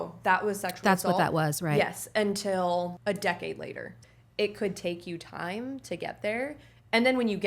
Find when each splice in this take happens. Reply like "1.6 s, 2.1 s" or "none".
3.0 s, 3.9 s